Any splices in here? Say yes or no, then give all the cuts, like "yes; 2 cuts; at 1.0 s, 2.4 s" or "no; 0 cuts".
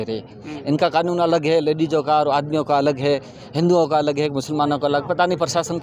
no; 0 cuts